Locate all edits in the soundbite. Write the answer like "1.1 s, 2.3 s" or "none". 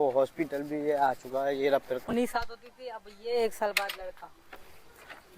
2.1 s